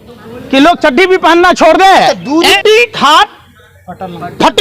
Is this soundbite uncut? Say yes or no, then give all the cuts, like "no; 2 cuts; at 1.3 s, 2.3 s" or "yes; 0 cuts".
no; 1 cut; at 2.5 s